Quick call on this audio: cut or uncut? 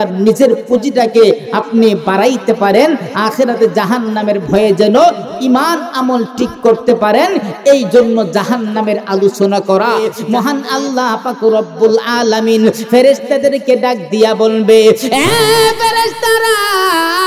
cut